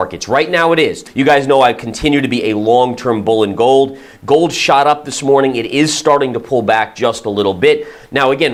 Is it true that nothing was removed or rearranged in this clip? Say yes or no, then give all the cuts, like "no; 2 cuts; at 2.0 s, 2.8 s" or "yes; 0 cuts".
yes; 0 cuts